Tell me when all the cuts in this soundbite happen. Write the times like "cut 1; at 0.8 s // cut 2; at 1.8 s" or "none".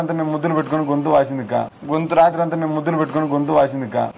none